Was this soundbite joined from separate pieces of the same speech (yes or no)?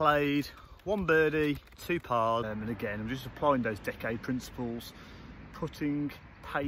yes